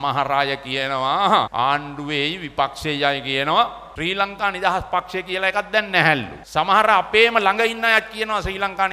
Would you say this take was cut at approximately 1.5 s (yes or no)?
yes